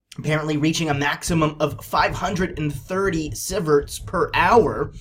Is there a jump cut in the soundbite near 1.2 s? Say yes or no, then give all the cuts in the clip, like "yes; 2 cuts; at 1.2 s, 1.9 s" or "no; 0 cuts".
yes; 1 cut; at 1.2 s